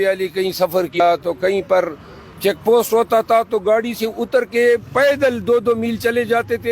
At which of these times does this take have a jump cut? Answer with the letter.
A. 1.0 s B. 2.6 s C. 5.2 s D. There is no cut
A